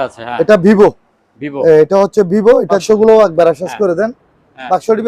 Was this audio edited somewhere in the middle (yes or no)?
yes